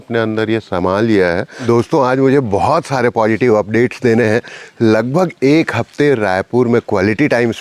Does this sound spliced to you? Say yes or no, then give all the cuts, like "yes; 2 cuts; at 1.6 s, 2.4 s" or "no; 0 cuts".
yes; 1 cut; at 1.5 s